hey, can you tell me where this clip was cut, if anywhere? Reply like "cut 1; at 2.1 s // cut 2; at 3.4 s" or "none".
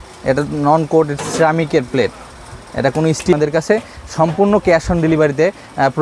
cut 1; at 3.3 s